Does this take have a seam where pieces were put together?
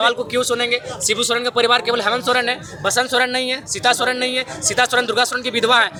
no; 0 cuts

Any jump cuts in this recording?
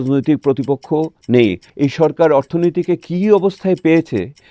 yes; 1 cut; at 1.7 s

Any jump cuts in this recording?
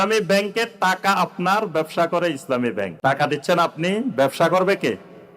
yes; 1 cut; at 2.9 s

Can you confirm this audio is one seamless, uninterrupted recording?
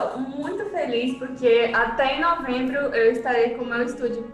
yes; 0 cuts

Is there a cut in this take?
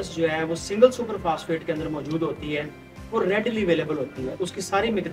no; 0 cuts

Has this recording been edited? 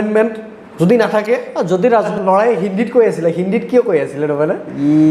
yes; 1 cut; at 2.1 s

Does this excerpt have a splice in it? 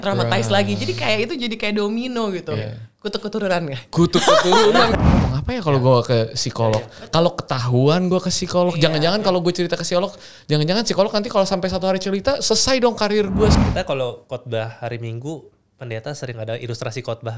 yes; 2 cuts; at 4.9 s, 13.6 s

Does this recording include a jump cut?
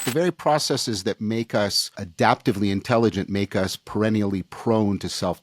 no; 0 cuts

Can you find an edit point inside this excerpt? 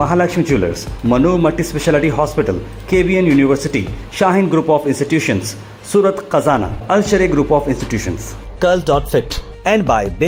no; 0 cuts

